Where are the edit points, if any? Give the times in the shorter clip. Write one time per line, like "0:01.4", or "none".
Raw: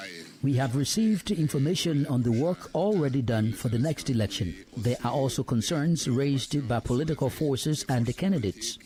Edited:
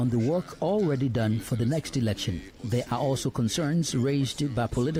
none